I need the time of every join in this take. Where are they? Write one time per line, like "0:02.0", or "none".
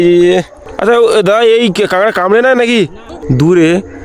0:03.1